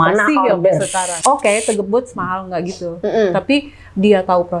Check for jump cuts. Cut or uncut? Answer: cut